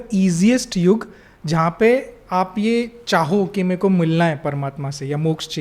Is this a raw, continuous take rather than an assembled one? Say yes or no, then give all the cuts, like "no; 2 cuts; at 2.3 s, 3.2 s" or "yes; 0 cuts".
yes; 0 cuts